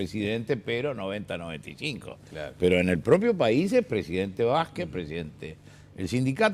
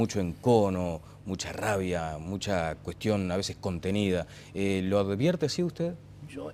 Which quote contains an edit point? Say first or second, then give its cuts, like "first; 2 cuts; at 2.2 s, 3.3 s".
first; 1 cut; at 4.1 s